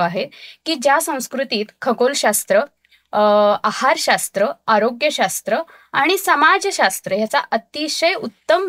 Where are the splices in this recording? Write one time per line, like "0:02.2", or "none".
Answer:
none